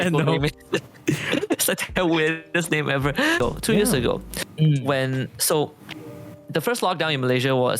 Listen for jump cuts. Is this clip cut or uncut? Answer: cut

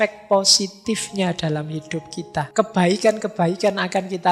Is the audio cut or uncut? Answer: cut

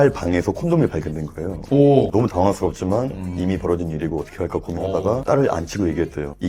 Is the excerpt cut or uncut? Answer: cut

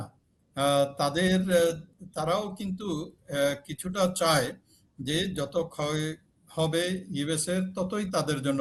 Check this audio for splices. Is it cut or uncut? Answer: uncut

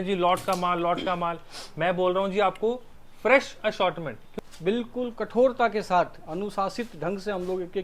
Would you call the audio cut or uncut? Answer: cut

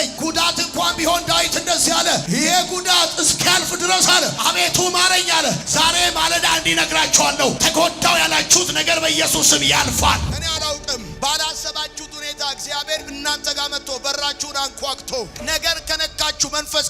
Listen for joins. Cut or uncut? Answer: cut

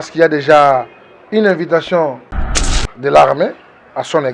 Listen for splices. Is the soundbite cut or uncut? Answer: cut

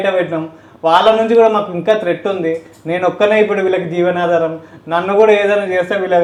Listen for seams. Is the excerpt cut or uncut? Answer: uncut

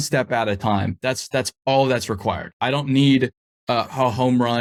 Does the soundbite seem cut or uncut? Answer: uncut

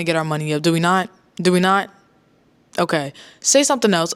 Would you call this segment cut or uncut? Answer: uncut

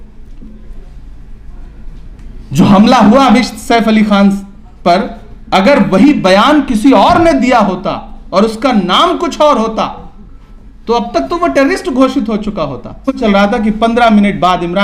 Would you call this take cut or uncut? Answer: cut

